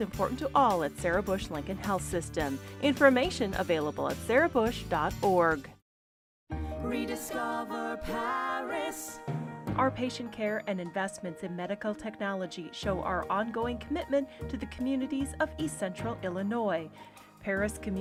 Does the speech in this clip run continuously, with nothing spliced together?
yes; 0 cuts

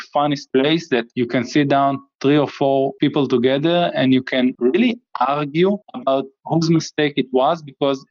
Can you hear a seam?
yes; 2 cuts; at 2.9 s, 4.6 s

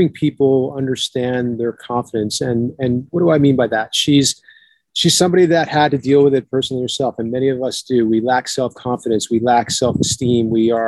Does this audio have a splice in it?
no; 0 cuts

